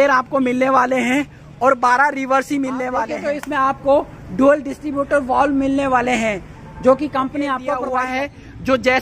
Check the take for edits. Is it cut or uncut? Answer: cut